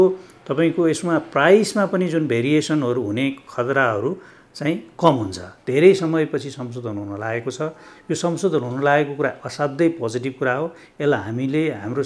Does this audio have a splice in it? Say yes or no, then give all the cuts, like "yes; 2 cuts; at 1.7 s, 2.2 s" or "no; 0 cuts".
yes; 1 cut; at 5.5 s